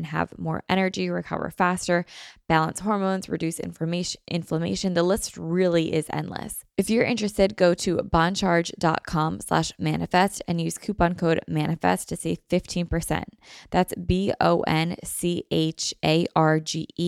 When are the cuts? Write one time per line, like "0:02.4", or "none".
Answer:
0:06.6